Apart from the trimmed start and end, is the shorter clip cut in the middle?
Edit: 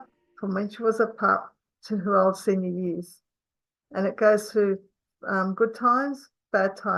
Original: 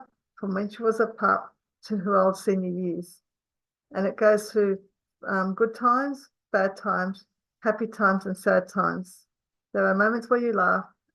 no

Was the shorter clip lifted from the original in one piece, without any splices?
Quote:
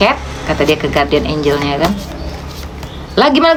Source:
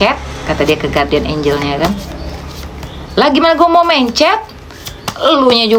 yes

